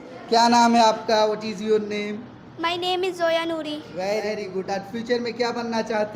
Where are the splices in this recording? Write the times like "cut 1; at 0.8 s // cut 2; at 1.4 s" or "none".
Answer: none